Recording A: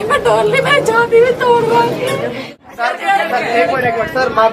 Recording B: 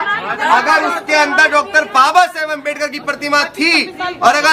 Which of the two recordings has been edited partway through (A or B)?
A